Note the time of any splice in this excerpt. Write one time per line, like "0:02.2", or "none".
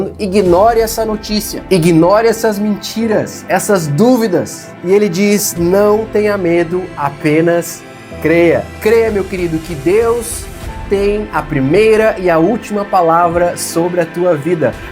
0:01.5
0:04.7
0:08.7